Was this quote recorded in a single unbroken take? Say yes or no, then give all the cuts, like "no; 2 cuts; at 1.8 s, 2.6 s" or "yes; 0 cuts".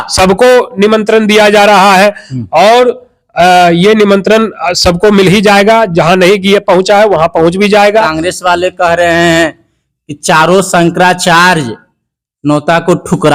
yes; 0 cuts